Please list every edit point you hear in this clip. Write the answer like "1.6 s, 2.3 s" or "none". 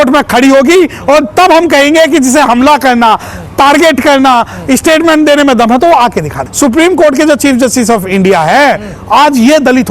6.5 s